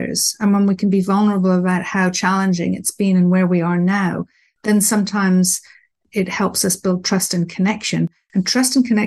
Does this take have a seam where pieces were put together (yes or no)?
no